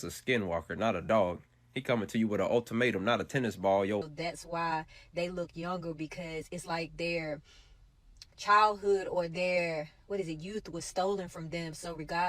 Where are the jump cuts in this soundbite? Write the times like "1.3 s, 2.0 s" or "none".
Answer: 4.0 s

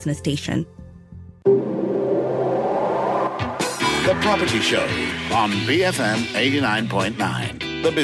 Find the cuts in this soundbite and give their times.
1.0 s

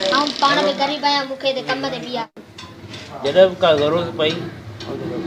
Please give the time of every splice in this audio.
2.4 s

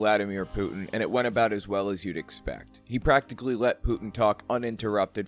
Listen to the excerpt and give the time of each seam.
none

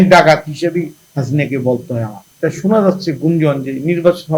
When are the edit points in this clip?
2.2 s

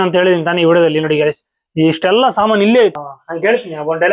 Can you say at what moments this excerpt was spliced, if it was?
3.0 s

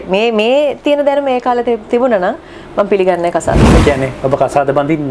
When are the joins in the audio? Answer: none

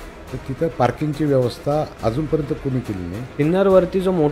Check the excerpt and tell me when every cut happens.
1.9 s, 3.2 s

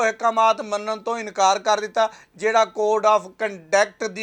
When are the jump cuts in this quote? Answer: none

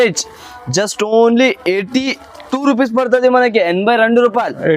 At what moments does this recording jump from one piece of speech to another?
none

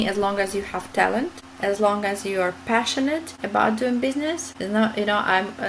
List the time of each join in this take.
1.4 s, 3.3 s, 4.5 s

